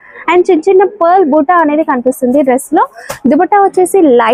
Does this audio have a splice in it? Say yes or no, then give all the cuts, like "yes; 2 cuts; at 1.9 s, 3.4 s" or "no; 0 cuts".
no; 0 cuts